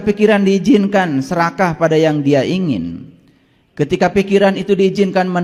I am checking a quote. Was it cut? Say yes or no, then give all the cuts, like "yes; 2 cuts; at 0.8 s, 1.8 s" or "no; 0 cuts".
no; 0 cuts